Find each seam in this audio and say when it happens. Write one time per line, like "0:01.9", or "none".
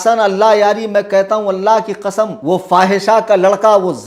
0:02.4